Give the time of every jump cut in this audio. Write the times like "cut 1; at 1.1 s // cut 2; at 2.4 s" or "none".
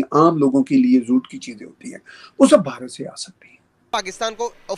cut 1; at 3.9 s